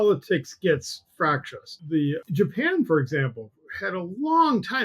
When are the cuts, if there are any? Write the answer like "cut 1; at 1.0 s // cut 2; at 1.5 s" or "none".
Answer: cut 1; at 2.2 s